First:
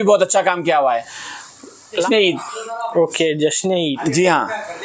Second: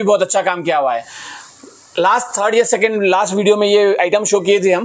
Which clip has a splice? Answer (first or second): first